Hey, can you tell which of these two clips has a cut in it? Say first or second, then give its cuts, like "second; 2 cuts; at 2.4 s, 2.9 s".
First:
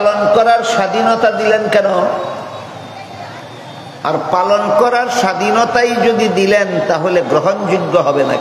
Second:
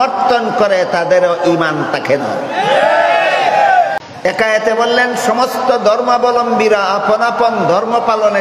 second; 1 cut; at 4.1 s